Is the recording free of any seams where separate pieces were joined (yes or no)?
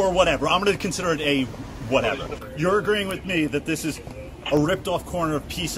no